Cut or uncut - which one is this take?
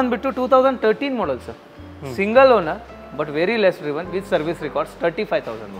uncut